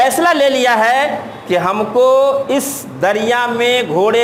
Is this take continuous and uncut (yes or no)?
yes